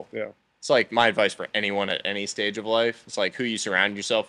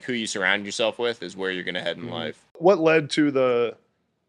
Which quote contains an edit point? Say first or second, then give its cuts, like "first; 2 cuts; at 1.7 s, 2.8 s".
second; 1 cut; at 2.6 s